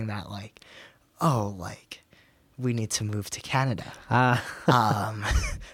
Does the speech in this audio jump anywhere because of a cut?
no; 0 cuts

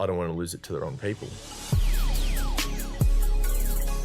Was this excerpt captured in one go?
no; 1 cut; at 1.4 s

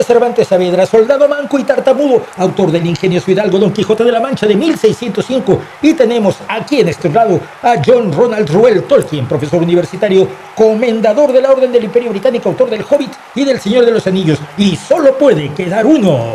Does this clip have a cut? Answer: no; 0 cuts

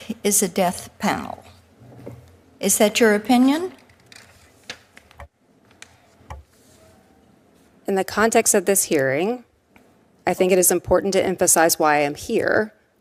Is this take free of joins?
yes; 0 cuts

